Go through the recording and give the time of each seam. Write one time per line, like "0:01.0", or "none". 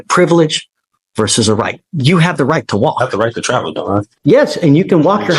0:04.1